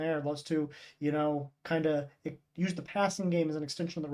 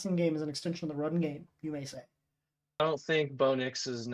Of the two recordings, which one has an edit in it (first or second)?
second